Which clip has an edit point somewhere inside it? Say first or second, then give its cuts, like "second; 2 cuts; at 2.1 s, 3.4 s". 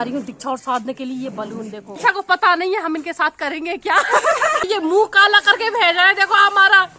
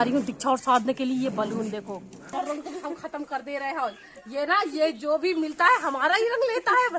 first; 2 cuts; at 1.9 s, 4.7 s